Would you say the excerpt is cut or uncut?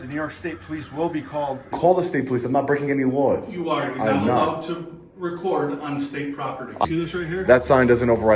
cut